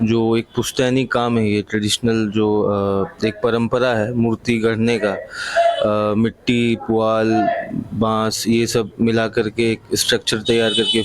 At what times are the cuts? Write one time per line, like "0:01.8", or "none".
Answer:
none